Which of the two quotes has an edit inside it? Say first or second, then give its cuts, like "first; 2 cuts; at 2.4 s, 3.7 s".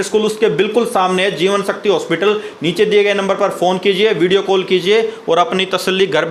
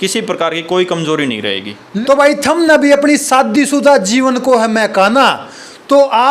second; 1 cut; at 1.9 s